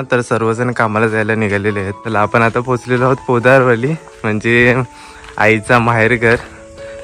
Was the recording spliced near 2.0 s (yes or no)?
yes